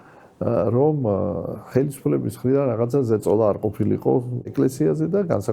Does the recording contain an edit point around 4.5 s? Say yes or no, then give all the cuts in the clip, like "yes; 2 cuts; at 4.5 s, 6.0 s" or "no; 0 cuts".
yes; 1 cut; at 4.5 s